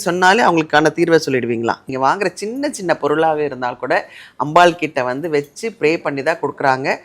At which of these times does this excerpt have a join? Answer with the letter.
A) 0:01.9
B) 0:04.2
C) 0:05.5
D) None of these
A